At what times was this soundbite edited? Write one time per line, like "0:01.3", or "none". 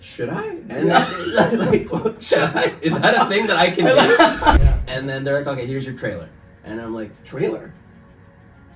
0:04.6